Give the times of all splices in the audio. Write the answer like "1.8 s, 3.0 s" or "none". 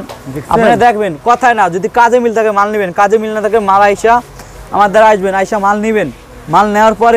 none

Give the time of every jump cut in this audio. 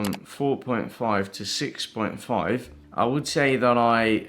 2.8 s

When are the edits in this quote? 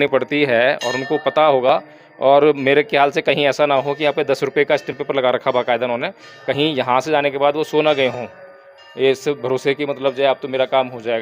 none

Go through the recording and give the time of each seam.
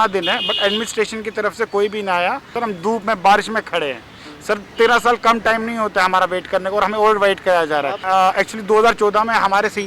2.5 s, 8.0 s

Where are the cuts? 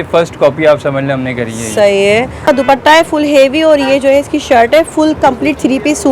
2.5 s

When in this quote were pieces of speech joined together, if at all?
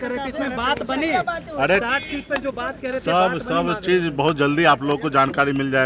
none

